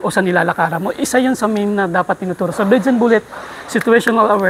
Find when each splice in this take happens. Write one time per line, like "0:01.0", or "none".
none